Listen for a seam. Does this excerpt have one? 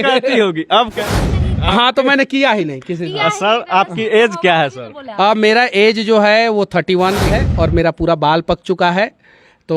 yes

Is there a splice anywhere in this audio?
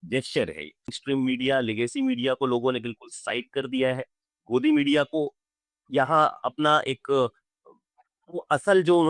yes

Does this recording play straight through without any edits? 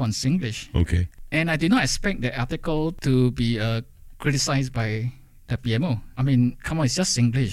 no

